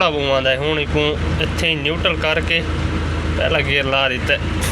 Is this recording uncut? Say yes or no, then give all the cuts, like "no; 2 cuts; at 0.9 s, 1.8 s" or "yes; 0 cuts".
yes; 0 cuts